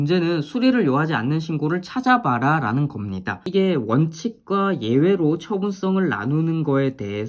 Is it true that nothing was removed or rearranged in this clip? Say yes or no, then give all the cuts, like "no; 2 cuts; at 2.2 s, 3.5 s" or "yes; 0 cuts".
no; 1 cut; at 3.4 s